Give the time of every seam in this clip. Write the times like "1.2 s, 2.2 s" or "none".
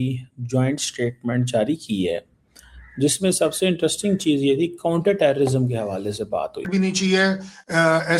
6.7 s